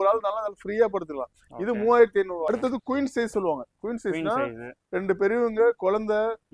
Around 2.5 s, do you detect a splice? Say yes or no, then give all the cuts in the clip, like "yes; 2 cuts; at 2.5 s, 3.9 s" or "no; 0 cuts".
yes; 1 cut; at 2.5 s